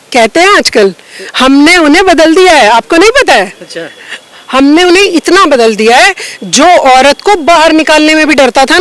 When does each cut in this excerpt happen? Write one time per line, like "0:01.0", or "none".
none